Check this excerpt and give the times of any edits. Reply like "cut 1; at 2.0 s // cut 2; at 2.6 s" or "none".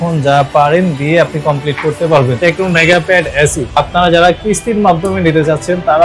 cut 1; at 2.4 s // cut 2; at 3.8 s